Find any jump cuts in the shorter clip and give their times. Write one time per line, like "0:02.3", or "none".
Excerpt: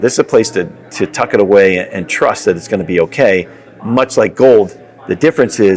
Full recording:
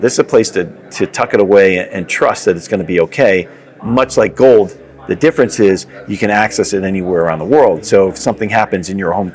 none